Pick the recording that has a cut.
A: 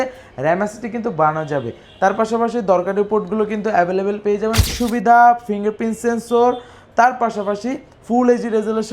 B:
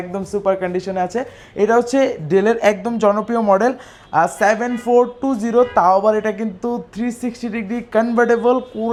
A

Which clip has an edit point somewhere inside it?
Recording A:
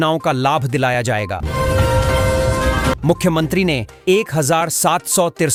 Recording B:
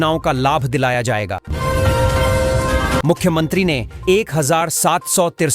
B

